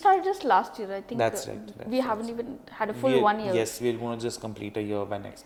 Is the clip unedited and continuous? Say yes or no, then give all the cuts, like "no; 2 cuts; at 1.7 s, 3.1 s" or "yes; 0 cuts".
yes; 0 cuts